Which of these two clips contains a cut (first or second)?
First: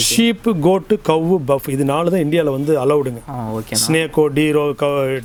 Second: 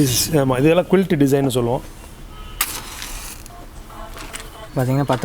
second